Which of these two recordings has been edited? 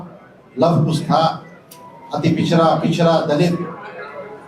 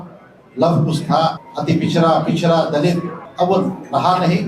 second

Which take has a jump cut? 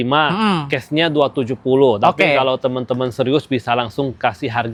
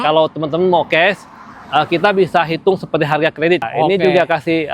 second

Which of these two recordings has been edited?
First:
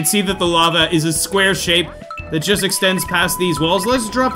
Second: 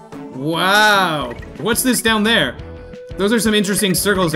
second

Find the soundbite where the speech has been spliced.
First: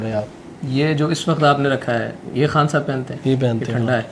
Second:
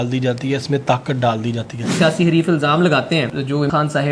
second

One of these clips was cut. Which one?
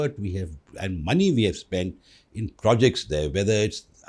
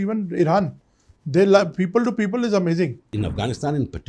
second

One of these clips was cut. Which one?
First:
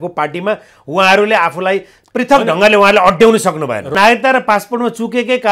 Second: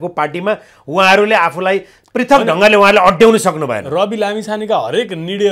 first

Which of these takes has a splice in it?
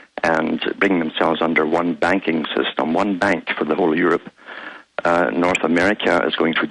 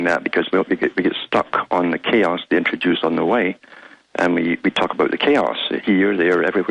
first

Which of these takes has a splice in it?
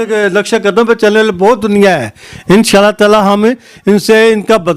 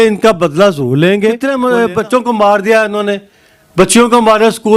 second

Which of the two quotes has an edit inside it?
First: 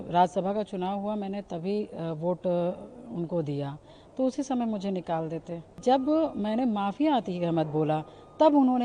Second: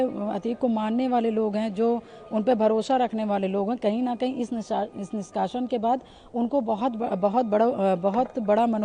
first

